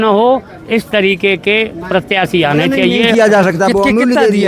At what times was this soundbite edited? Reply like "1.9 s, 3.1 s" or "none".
3.0 s